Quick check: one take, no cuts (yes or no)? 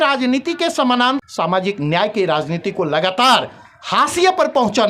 no